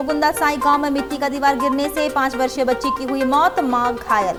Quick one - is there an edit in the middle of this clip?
no; 0 cuts

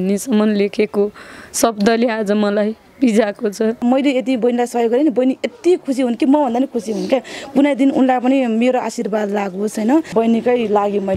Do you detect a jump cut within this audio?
yes; 2 cuts; at 3.8 s, 10.1 s

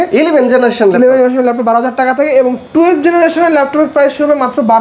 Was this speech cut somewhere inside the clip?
no; 0 cuts

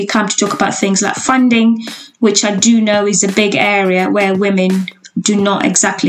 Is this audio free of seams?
yes; 0 cuts

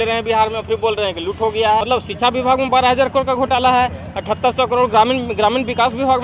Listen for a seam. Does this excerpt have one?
yes; 1 cut; at 1.8 s

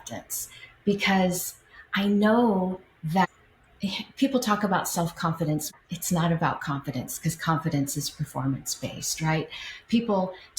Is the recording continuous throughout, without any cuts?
no; 1 cut; at 5.7 s

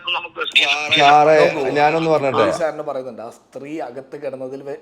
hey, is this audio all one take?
no; 1 cut; at 2.6 s

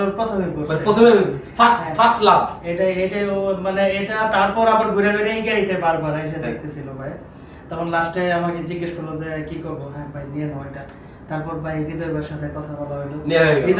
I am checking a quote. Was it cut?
no; 0 cuts

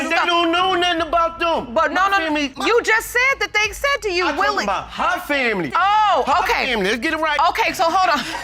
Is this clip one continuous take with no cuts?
yes; 0 cuts

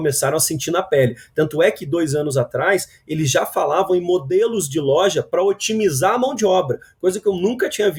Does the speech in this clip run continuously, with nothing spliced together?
yes; 0 cuts

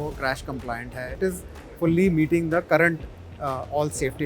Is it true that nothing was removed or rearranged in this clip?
no; 1 cut; at 1.2 s

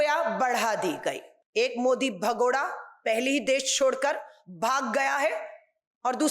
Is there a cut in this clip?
yes; 1 cut; at 1.3 s

